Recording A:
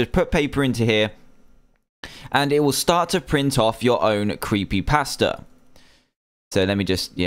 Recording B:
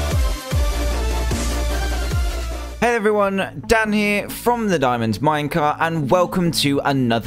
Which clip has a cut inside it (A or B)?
B